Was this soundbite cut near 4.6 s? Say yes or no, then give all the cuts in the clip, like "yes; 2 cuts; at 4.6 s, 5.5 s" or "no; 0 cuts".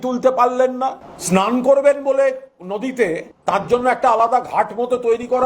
no; 2 cuts; at 1.1 s, 3.3 s